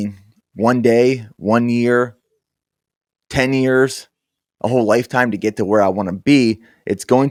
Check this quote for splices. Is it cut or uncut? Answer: uncut